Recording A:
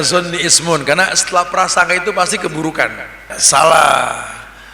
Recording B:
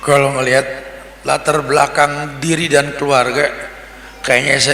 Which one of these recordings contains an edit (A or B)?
A